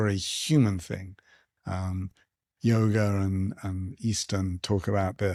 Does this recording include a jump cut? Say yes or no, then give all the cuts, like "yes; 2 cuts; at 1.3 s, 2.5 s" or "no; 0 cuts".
no; 0 cuts